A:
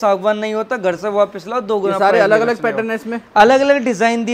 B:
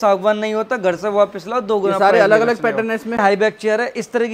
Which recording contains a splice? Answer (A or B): B